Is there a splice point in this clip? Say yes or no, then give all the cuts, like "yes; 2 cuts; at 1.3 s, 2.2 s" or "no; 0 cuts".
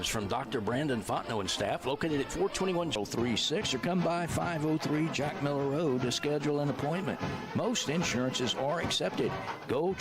yes; 1 cut; at 2.9 s